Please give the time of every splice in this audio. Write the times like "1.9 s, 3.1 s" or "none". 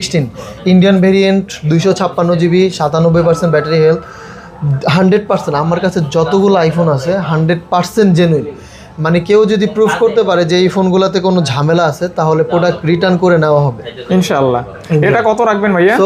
none

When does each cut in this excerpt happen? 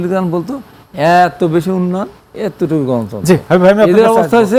none

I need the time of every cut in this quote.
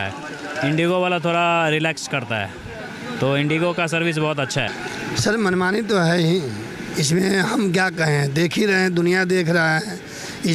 4.8 s

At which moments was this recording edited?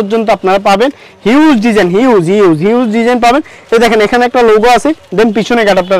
none

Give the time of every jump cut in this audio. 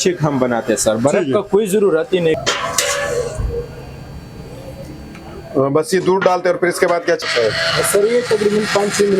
2.4 s, 7.2 s

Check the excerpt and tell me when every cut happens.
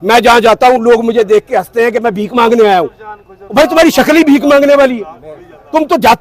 none

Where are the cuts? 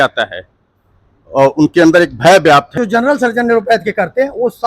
2.7 s

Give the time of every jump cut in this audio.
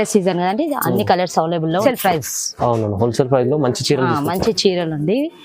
1.8 s

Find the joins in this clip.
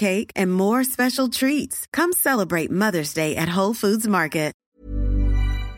4.6 s

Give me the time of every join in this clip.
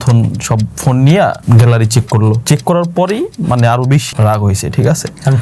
1.4 s, 2.4 s, 4.1 s

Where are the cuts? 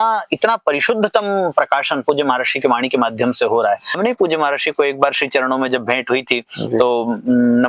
4.0 s

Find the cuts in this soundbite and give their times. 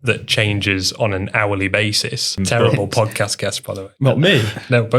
2.4 s

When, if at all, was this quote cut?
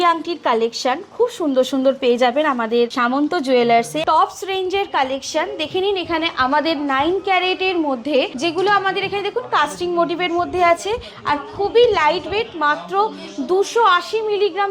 3.0 s, 3.9 s, 8.3 s

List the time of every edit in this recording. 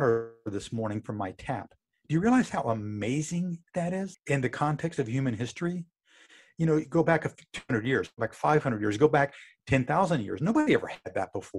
4.2 s

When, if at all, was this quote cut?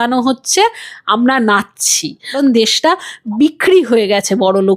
2.3 s, 3.2 s

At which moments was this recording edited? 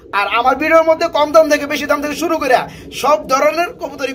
none

